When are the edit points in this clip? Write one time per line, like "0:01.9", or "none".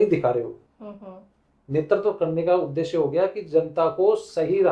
none